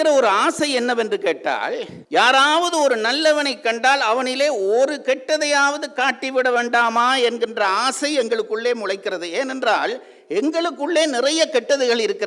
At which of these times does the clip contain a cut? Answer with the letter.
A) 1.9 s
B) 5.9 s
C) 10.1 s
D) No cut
A